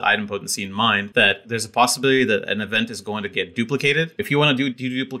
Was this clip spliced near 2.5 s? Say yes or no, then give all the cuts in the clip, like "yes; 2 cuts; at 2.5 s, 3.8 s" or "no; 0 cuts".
no; 2 cuts; at 1.1 s, 4.2 s